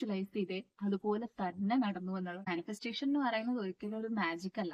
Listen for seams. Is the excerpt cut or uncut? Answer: cut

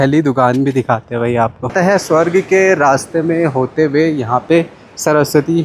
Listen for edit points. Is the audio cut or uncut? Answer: cut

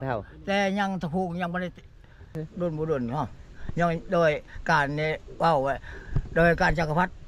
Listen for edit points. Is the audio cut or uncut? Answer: cut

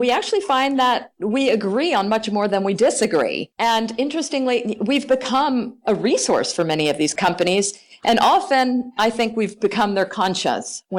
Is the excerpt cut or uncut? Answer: cut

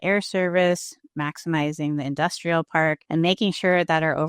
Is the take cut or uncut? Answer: cut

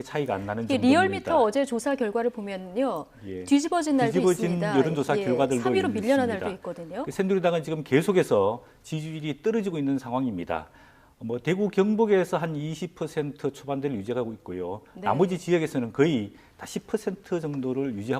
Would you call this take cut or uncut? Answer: cut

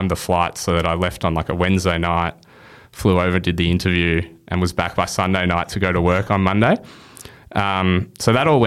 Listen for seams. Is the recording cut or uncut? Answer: uncut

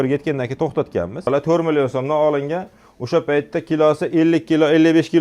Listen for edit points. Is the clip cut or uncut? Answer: cut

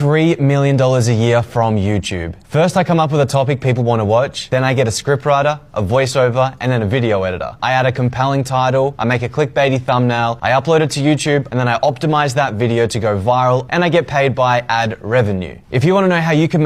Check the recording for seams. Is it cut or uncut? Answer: uncut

